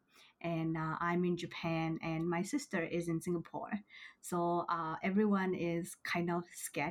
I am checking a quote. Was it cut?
no; 0 cuts

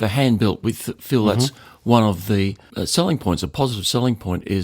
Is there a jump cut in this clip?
yes; 1 cut; at 2.7 s

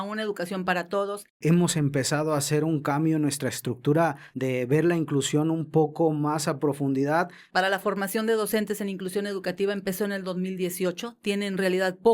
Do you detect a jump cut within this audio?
yes; 3 cuts; at 1.3 s, 4.3 s, 7.4 s

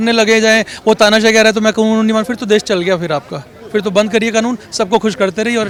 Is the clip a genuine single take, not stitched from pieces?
yes; 0 cuts

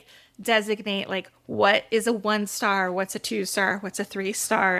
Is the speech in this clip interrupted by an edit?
no; 0 cuts

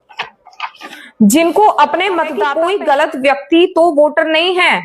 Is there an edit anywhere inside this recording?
yes; 1 cut; at 2.4 s

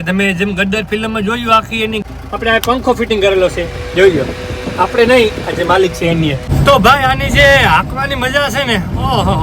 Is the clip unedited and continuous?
no; 2 cuts; at 2.0 s, 6.5 s

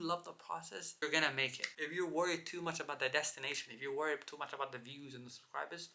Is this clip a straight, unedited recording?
no; 1 cut; at 0.9 s

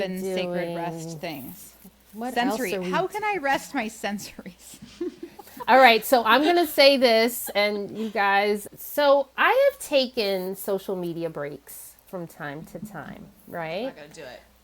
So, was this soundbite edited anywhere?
yes; 1 cut; at 8.6 s

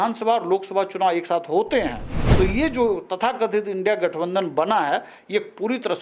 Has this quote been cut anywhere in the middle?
no; 0 cuts

